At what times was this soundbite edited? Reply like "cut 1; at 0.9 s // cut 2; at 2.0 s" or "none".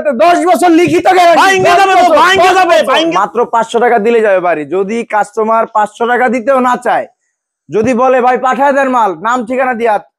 cut 1; at 3.1 s